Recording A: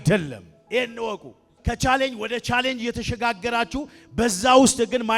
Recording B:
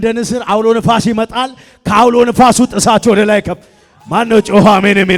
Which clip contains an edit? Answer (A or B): A